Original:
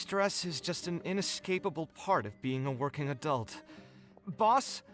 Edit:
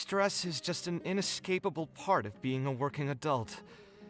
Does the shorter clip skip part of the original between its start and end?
no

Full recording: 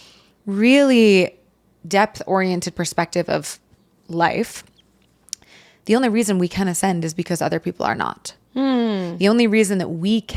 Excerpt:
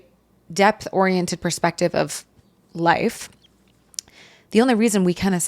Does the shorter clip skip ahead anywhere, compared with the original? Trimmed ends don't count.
no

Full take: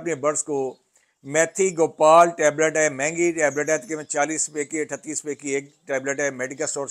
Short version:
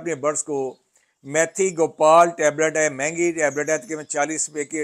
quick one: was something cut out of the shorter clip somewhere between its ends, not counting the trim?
no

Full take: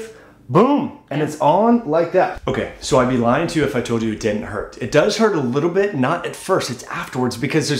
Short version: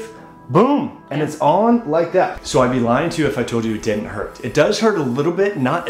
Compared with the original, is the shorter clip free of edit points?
no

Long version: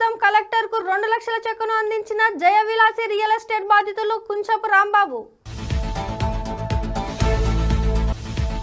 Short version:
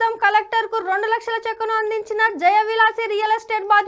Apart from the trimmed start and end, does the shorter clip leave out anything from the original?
no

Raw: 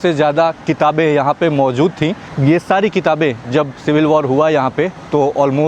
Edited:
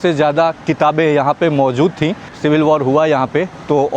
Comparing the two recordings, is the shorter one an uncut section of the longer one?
no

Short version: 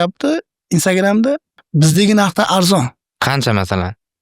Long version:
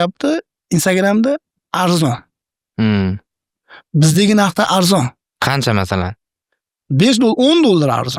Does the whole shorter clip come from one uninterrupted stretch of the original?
no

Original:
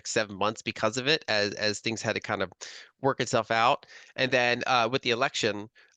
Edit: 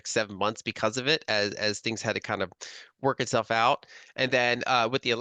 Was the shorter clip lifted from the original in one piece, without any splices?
yes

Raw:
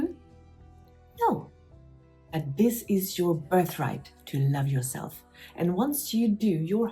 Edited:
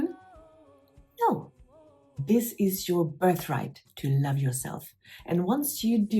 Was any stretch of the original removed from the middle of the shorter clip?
yes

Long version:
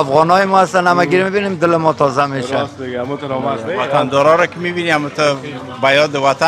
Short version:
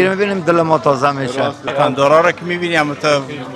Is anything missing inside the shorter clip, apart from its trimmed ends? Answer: yes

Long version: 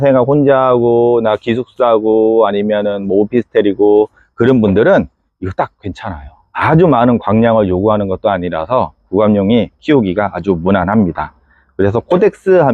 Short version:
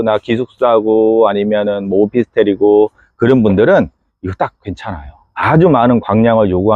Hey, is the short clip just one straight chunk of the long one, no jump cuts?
yes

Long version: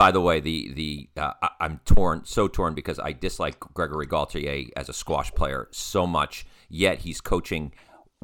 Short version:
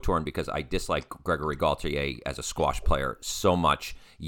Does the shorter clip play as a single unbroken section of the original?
yes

